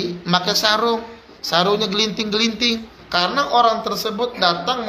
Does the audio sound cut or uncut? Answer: cut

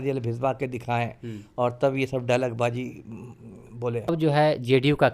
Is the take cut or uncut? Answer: cut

